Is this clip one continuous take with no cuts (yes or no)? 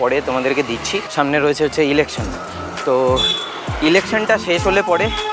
no